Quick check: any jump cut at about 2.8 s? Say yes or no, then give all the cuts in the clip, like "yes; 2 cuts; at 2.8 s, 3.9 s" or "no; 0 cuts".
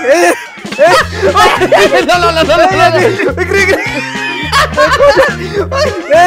no; 0 cuts